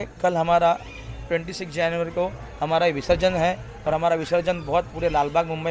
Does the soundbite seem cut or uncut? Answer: uncut